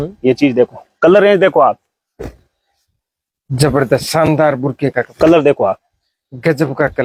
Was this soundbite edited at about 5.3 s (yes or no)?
no